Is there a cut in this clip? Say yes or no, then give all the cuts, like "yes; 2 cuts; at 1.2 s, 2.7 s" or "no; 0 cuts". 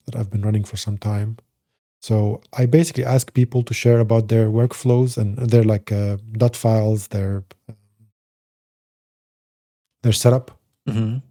no; 0 cuts